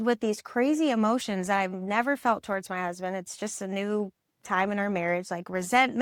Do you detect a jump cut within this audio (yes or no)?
no